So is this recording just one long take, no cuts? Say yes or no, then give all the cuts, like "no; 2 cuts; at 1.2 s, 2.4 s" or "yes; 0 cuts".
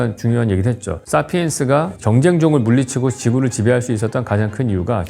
no; 2 cuts; at 0.9 s, 2.0 s